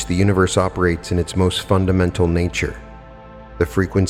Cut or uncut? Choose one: uncut